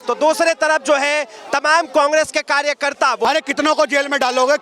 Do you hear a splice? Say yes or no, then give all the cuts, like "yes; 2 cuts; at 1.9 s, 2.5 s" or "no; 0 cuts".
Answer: yes; 1 cut; at 3.2 s